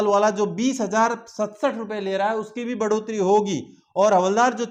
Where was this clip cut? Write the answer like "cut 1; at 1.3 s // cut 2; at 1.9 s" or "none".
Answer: none